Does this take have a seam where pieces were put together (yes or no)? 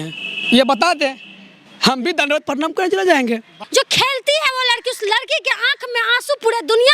yes